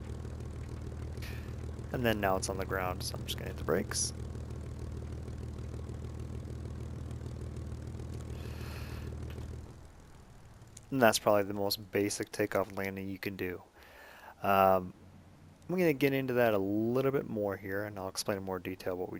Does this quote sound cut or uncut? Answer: uncut